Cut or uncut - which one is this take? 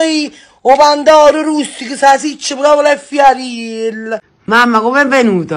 cut